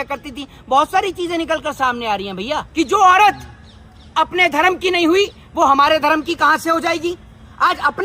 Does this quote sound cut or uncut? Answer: cut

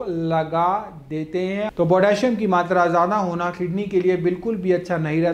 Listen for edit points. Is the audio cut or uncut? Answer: cut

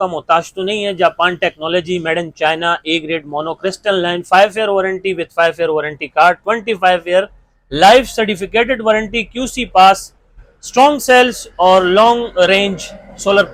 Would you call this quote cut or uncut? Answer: uncut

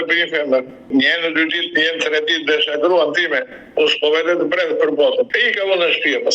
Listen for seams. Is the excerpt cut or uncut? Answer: cut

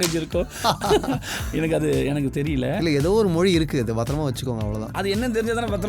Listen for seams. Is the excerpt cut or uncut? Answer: cut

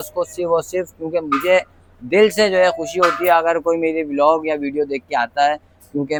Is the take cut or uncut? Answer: uncut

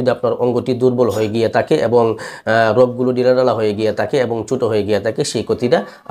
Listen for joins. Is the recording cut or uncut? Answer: uncut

